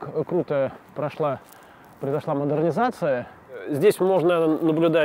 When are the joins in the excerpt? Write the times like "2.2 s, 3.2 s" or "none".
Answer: 3.6 s